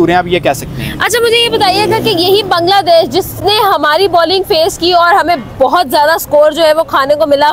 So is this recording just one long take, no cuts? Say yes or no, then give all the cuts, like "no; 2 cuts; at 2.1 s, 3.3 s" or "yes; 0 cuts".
yes; 0 cuts